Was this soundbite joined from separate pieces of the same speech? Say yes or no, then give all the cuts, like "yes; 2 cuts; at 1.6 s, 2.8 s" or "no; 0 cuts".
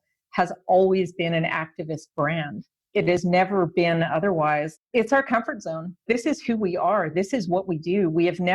yes; 1 cut; at 4.7 s